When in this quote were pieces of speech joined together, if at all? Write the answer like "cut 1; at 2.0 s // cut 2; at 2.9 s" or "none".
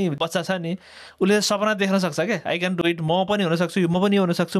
none